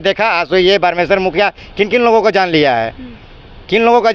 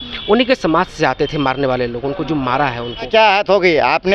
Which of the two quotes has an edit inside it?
second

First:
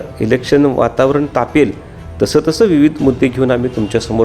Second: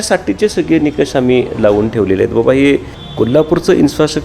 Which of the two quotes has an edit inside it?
second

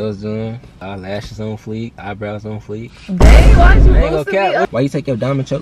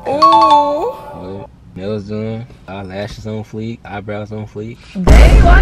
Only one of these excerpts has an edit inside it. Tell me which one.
first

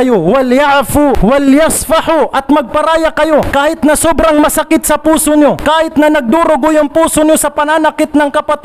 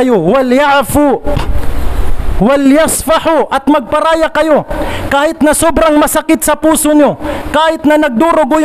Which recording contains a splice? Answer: first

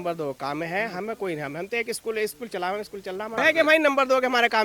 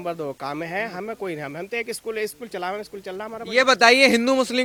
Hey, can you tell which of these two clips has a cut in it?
first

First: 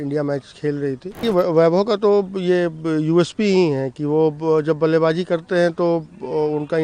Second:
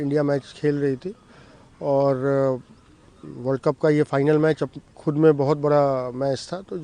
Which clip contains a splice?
first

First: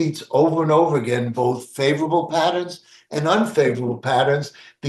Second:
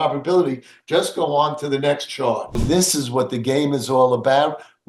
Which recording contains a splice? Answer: second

